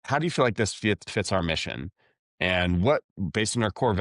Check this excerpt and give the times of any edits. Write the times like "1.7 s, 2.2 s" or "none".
none